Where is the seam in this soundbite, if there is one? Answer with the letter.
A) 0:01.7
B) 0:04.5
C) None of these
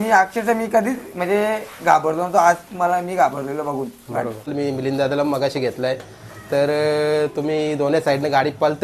B